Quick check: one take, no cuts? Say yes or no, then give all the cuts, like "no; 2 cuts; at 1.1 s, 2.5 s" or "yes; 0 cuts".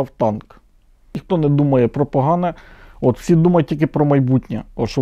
no; 1 cut; at 1.2 s